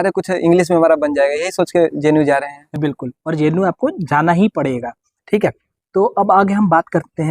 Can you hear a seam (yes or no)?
no